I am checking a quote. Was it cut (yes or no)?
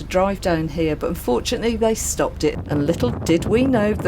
yes